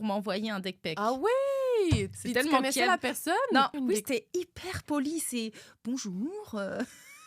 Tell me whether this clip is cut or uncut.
cut